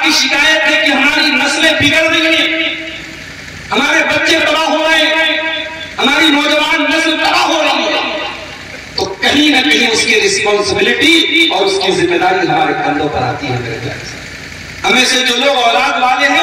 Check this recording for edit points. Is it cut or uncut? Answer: cut